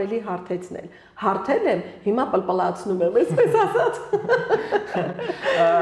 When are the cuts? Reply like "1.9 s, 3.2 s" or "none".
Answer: none

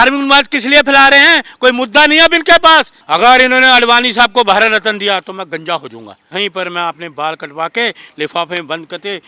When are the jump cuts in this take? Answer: 3.0 s, 6.3 s

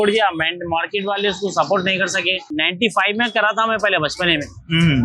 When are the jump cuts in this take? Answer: 2.4 s

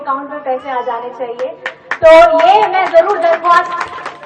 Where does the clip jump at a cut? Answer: none

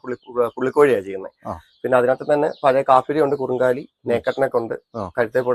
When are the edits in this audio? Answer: none

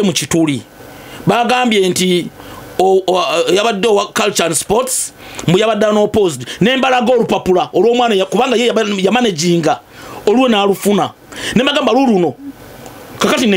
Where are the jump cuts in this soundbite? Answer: none

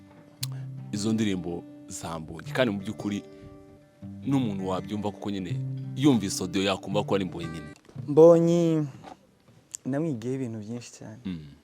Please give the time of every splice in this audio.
7.6 s

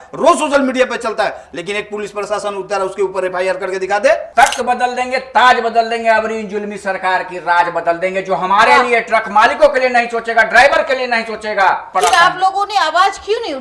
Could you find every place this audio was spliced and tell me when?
4.3 s, 11.9 s

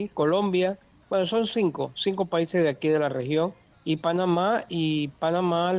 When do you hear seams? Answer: 0.9 s, 3.7 s

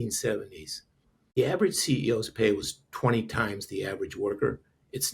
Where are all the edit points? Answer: 1.4 s

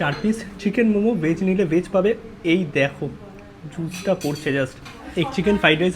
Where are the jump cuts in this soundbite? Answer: 5.1 s

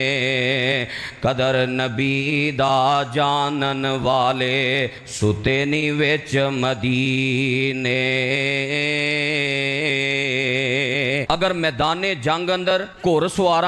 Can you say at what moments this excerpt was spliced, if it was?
11.2 s

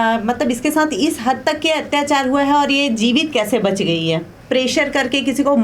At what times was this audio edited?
4.3 s

